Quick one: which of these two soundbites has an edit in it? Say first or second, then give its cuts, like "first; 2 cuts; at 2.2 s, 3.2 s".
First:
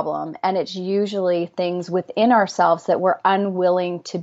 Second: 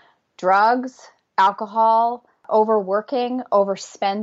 second; 1 cut; at 2.4 s